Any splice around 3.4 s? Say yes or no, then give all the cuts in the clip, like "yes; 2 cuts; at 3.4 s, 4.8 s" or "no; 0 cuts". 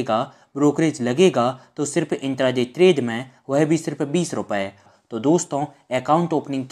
no; 1 cut; at 4.9 s